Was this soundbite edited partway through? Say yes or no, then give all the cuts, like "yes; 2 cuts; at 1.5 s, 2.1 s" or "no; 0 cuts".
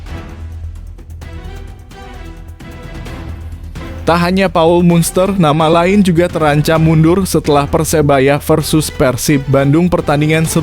yes; 1 cut; at 4.0 s